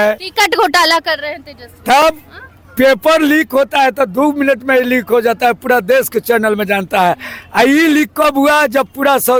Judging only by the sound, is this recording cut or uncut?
uncut